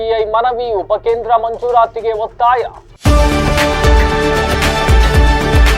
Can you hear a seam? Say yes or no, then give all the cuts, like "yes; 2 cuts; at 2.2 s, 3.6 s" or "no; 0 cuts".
yes; 1 cut; at 2.8 s